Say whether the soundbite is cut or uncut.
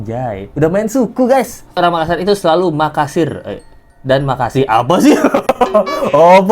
cut